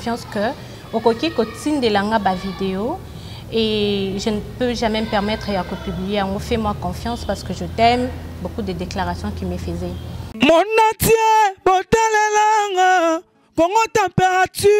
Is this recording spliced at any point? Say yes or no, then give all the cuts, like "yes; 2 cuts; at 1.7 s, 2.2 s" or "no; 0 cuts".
yes; 1 cut; at 10.3 s